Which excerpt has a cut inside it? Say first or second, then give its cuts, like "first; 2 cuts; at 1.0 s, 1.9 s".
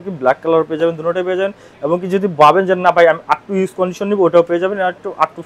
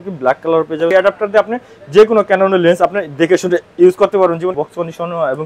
second; 2 cuts; at 0.9 s, 4.6 s